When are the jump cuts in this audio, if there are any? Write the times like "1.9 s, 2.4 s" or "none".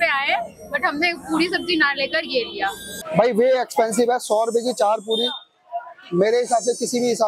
2.9 s